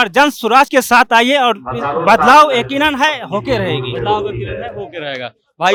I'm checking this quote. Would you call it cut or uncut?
uncut